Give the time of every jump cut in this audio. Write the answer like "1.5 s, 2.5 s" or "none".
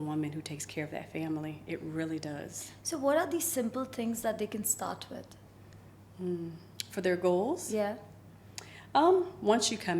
none